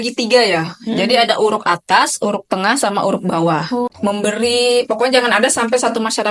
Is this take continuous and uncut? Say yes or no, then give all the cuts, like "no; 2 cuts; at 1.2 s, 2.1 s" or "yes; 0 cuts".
no; 1 cut; at 3.9 s